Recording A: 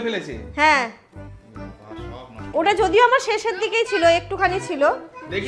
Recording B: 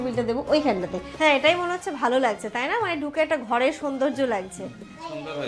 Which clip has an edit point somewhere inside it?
B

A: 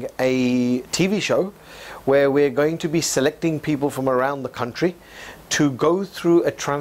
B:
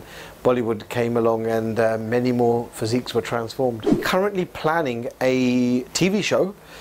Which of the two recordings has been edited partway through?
B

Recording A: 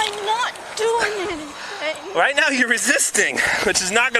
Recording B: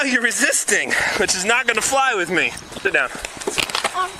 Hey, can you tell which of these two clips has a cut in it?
B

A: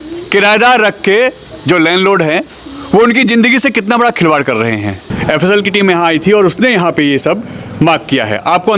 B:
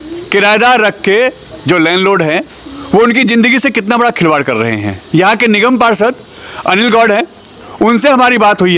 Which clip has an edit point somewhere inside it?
A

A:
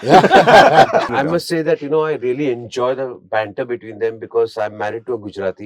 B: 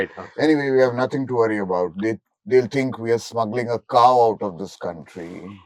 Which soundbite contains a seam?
A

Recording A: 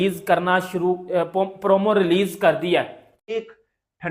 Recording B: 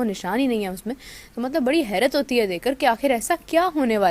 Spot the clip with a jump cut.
A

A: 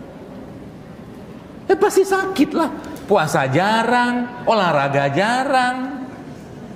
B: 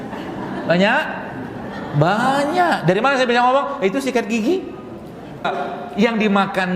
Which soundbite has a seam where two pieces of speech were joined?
B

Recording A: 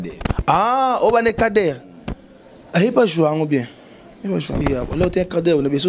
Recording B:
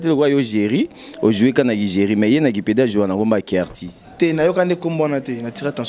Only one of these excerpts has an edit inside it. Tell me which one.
A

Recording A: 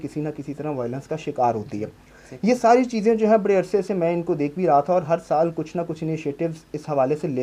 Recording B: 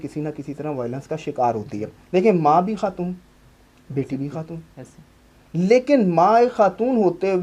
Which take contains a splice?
B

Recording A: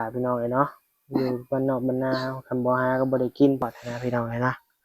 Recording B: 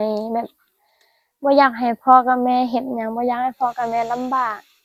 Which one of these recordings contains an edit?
A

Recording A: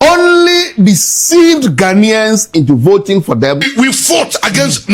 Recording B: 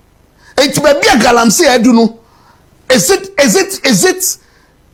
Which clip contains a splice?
A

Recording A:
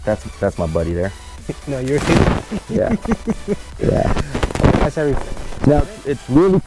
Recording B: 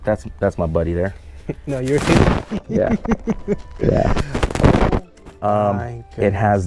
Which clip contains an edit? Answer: A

